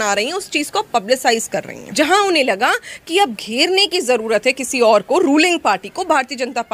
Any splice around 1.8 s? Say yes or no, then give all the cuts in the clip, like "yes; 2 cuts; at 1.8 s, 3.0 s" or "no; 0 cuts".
yes; 1 cut; at 1.8 s